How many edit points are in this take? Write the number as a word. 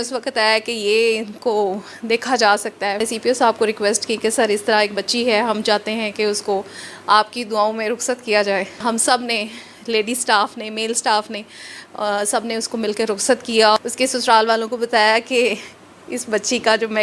three